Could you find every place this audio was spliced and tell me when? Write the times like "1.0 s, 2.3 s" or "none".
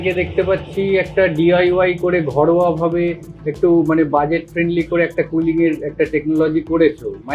none